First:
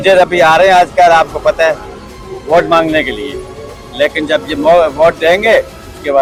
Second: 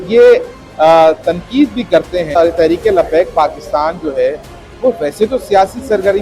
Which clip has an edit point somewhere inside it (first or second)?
second